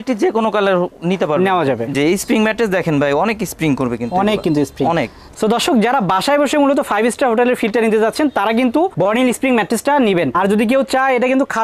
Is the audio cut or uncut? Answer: cut